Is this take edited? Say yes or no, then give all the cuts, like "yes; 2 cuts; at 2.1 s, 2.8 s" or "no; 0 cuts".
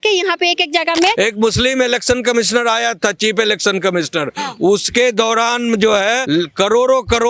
yes; 2 cuts; at 1.1 s, 6.2 s